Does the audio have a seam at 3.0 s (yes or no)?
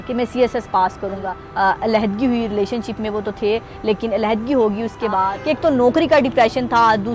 no